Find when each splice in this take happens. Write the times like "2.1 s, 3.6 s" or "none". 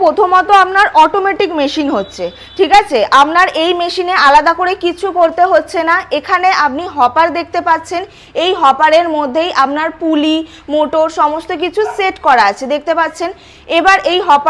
none